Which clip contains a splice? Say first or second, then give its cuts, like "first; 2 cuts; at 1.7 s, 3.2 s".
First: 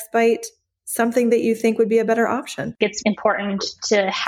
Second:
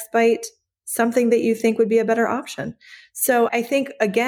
first; 1 cut; at 3.0 s